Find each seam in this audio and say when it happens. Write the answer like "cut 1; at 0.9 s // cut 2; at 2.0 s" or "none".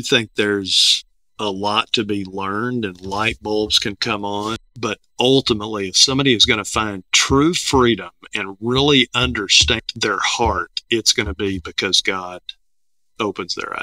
cut 1; at 4.7 s // cut 2; at 9.8 s